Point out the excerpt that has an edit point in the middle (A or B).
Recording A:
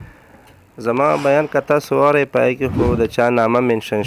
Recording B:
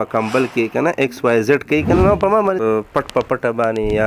B